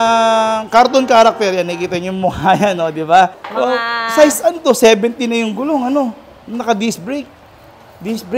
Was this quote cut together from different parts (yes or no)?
no